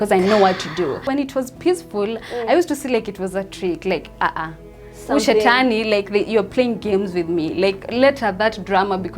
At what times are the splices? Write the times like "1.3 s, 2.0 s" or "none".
1.0 s